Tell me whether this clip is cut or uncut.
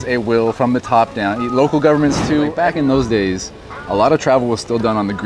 cut